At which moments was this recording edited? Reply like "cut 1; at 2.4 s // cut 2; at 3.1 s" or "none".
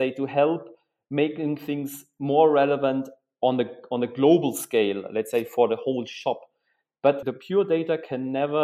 cut 1; at 7.2 s